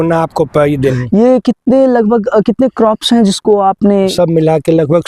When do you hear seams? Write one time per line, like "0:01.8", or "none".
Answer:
0:01.0
0:04.1